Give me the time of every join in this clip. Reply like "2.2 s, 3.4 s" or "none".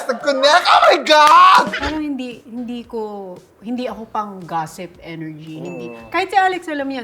1.7 s